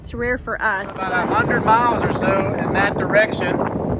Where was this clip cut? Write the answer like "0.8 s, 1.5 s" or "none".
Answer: 1.0 s